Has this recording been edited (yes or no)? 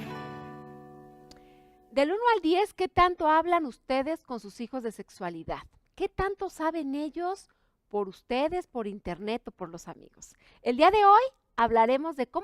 no